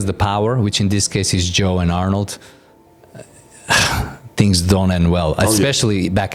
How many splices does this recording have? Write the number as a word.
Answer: zero